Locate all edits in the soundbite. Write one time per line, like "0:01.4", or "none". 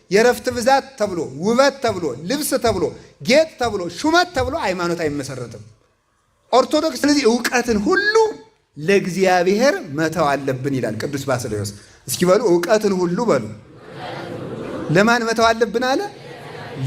0:07.0